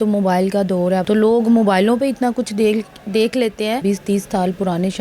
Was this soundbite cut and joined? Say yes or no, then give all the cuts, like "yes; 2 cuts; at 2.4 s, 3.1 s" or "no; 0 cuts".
yes; 2 cuts; at 1.0 s, 3.8 s